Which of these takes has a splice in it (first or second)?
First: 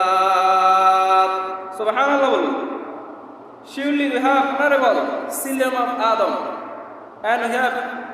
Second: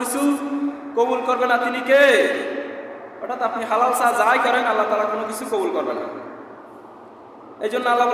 first